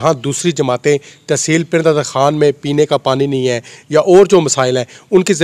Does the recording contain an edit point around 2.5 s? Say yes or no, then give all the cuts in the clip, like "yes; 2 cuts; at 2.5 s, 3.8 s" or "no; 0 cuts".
no; 0 cuts